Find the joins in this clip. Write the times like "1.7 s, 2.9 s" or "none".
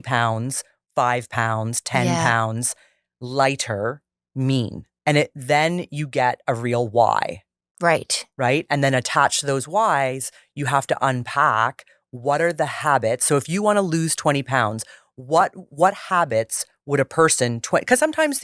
4.9 s